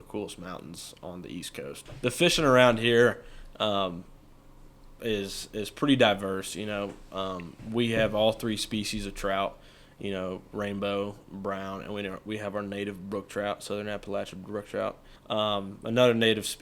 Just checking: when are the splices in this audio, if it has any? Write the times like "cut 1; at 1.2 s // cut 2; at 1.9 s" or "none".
cut 1; at 1.8 s // cut 2; at 15.1 s